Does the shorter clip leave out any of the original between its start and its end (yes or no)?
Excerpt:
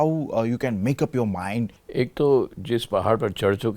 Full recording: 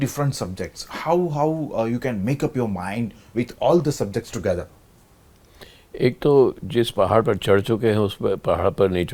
yes